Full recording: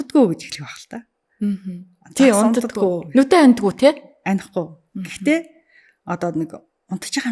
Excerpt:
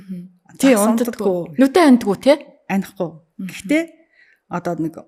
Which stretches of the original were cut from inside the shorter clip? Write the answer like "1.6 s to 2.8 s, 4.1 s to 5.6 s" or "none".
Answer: none